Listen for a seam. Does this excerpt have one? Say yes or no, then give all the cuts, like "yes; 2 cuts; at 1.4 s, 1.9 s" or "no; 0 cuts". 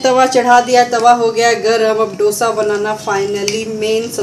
no; 0 cuts